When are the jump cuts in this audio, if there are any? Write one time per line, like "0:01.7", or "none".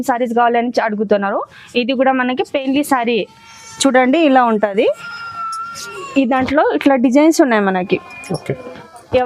none